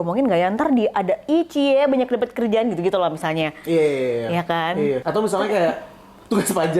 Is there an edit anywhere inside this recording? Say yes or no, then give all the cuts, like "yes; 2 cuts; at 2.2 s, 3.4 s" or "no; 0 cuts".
yes; 1 cut; at 5.0 s